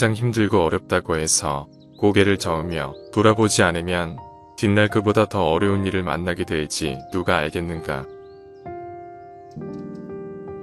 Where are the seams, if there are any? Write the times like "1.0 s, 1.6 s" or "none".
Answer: 8.3 s